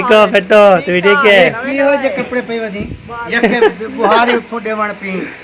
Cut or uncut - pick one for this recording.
uncut